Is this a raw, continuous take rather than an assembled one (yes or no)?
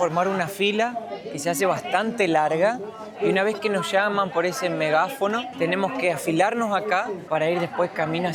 yes